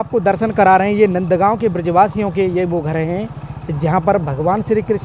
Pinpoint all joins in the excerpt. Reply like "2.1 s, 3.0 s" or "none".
none